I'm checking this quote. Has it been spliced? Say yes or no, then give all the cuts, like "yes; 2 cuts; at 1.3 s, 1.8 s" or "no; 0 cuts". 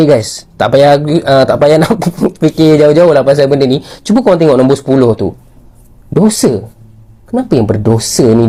no; 0 cuts